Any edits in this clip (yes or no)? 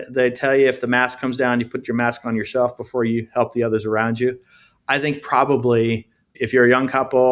no